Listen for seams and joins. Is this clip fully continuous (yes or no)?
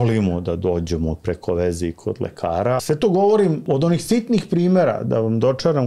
no